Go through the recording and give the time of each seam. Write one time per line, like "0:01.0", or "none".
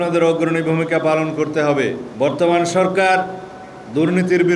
0:02.0